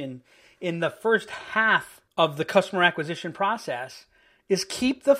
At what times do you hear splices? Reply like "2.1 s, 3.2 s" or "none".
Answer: 2.0 s